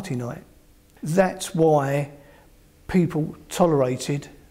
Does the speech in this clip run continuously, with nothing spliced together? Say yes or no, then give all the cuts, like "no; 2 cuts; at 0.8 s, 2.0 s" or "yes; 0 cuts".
yes; 0 cuts